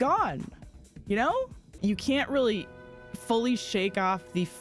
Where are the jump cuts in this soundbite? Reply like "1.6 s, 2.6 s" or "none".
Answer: 1.6 s